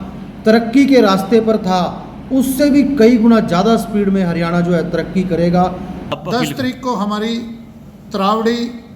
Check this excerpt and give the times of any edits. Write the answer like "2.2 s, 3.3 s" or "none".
6.1 s